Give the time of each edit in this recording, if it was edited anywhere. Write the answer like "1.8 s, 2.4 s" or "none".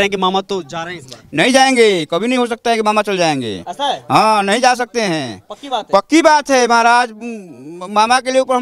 1.1 s